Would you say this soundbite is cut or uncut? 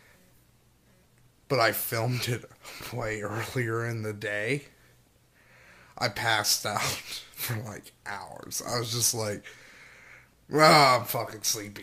cut